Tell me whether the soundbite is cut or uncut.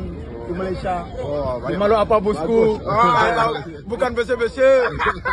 uncut